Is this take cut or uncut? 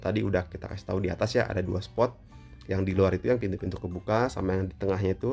uncut